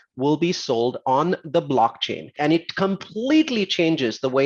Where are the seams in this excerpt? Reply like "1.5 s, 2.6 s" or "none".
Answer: 2.3 s

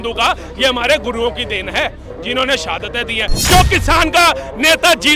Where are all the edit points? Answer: 3.4 s

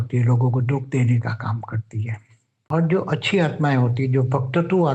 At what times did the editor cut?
2.7 s

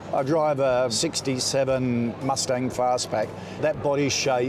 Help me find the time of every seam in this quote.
1.0 s

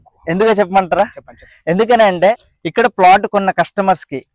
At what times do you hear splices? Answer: 2.5 s

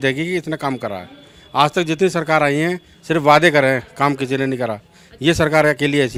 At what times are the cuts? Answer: none

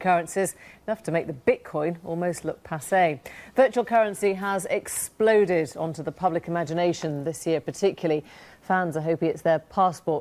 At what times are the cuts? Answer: none

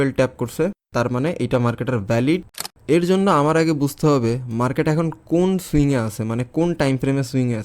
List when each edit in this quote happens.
2.6 s

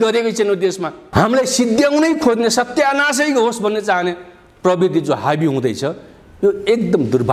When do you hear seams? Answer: 0.9 s

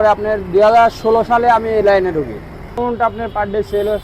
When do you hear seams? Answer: 2.8 s

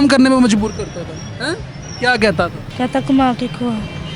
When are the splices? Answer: 2.6 s

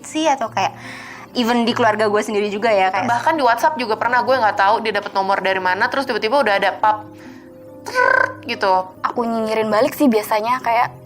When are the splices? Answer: 3.1 s, 8.9 s

